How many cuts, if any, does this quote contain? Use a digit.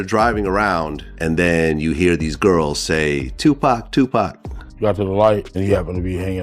2